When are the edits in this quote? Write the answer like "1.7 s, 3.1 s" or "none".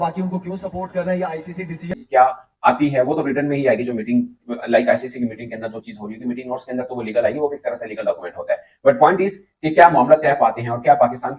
2.0 s